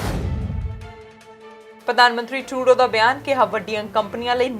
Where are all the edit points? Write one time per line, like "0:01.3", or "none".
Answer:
0:01.8